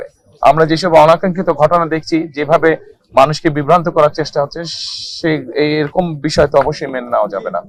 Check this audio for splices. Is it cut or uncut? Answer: uncut